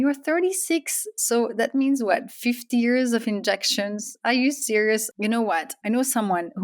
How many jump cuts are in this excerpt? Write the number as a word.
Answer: one